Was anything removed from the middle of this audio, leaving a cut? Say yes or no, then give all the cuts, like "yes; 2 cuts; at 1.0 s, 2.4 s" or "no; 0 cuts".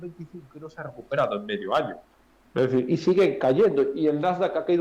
no; 0 cuts